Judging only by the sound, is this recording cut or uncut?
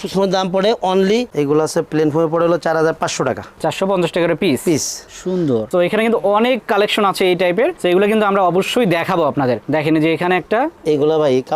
cut